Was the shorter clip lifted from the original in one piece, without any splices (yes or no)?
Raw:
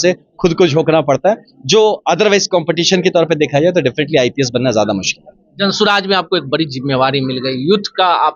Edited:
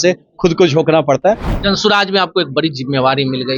no